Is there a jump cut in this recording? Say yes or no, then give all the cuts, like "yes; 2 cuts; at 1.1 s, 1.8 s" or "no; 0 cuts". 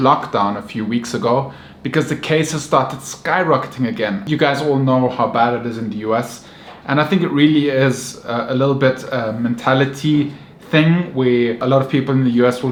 no; 0 cuts